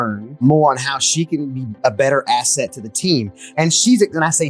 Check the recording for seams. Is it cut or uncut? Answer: uncut